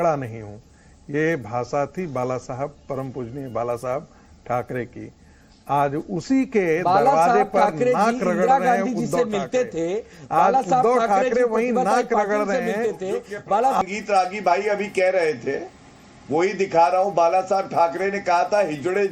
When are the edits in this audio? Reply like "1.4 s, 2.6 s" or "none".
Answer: 13.8 s